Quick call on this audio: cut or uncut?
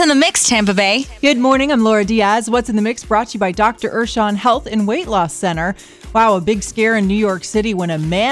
cut